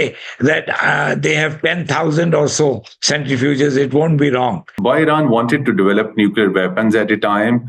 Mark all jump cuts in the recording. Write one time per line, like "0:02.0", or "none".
0:04.7

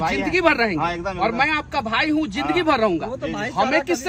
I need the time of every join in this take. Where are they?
none

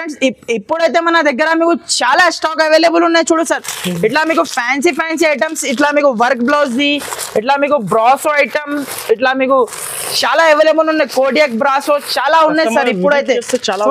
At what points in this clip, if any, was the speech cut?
none

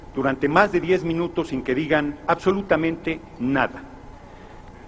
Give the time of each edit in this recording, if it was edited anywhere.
none

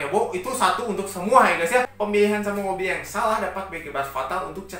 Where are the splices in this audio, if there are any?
0:01.9

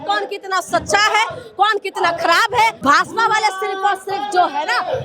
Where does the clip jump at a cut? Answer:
0:02.8

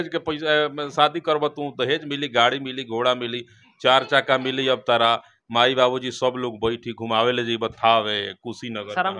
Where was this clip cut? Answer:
none

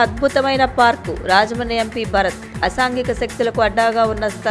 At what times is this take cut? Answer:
none

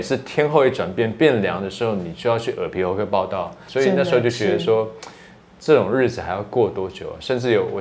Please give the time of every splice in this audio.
0:03.6

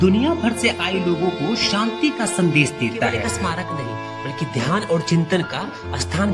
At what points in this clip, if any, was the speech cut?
0:03.3

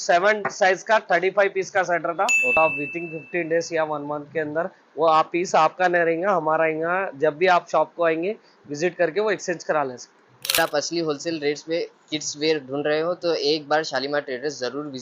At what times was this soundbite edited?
0:02.6
0:10.6

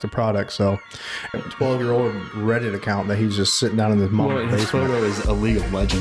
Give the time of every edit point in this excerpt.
0:01.3

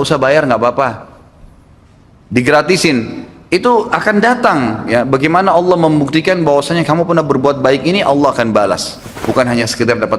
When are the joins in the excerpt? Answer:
0:09.1

